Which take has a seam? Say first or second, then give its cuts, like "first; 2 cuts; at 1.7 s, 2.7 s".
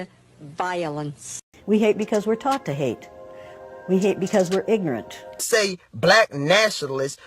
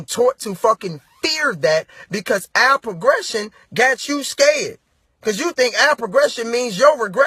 first; 2 cuts; at 1.6 s, 5.4 s